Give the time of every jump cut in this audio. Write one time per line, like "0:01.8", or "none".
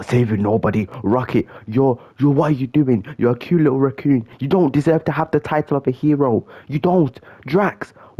none